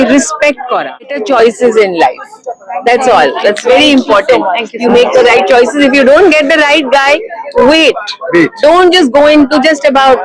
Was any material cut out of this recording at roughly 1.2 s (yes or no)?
yes